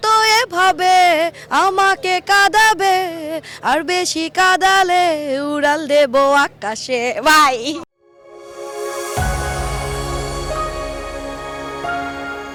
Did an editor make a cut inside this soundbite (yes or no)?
no